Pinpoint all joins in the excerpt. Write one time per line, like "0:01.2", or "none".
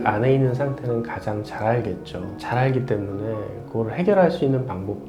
none